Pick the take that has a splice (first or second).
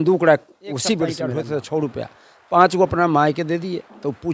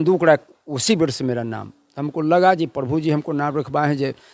first